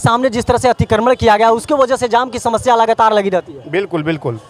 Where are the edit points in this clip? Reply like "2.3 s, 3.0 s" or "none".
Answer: none